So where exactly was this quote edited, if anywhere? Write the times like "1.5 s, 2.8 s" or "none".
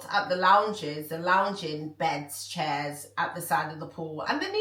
none